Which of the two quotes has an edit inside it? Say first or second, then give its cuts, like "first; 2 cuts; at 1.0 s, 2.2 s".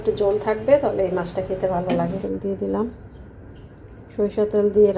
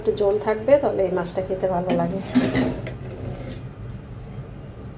first; 1 cut; at 2.2 s